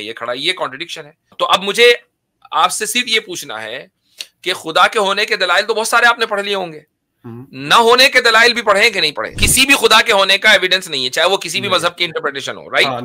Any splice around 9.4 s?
yes; 2 cuts; at 1.3 s, 9.4 s

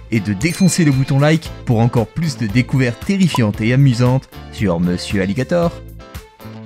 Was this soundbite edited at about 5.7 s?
yes; 1 cut; at 5.7 s

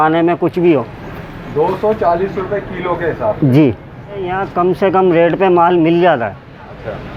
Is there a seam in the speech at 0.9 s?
no; 1 cut; at 4.4 s

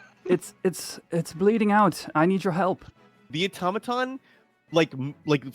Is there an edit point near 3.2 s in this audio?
yes; 1 cut; at 3.2 s

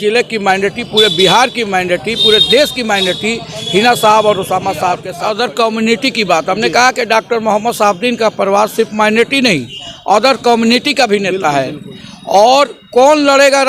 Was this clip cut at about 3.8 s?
no; 1 cut; at 5.1 s

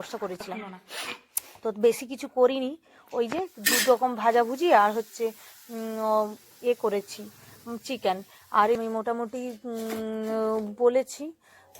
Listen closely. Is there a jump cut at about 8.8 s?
yes; 1 cut; at 8.8 s

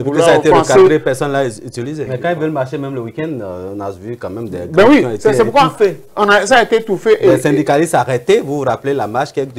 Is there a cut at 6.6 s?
no; 1 cut; at 2.0 s

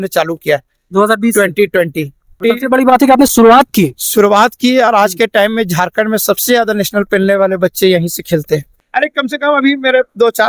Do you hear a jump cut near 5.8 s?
no; 2 cuts; at 2.4 s, 8.8 s

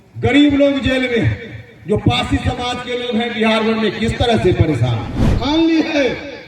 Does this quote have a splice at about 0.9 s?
no; 1 cut; at 5.3 s

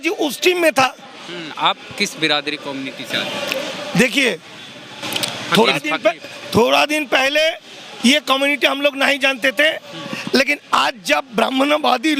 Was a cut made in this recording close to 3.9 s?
no; 1 cut; at 1.5 s

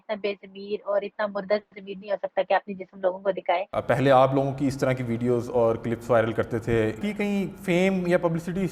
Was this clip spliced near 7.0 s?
yes; 2 cuts; at 3.7 s, 7.0 s

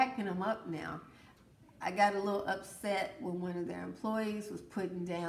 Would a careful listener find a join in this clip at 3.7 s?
no; 0 cuts

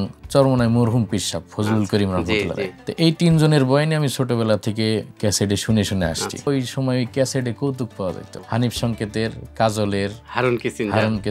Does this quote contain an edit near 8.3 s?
yes; 3 cuts; at 2.8 s, 6.5 s, 8.3 s

